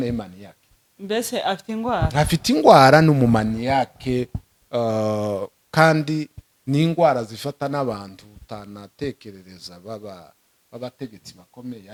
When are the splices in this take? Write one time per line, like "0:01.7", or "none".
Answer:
none